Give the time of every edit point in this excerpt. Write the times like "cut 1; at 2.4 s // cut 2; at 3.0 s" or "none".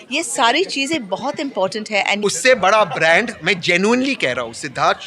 cut 1; at 2.2 s